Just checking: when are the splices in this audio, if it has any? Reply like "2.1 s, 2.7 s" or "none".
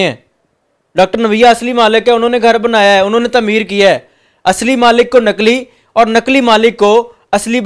none